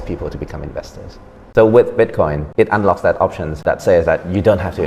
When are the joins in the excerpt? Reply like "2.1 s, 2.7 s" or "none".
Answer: 1.4 s, 2.4 s, 3.6 s